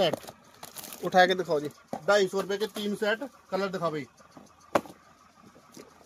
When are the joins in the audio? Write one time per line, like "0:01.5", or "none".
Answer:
none